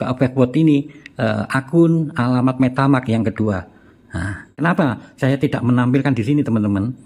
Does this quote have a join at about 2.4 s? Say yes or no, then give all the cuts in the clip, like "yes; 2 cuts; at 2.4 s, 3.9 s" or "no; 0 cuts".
no; 1 cut; at 4.5 s